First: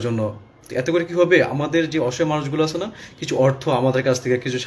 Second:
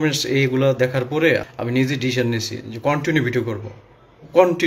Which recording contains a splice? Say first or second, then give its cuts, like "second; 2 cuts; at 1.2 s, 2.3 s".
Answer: second; 1 cut; at 1.5 s